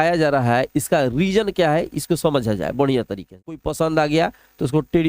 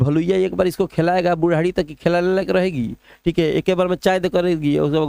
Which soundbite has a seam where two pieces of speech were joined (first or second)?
first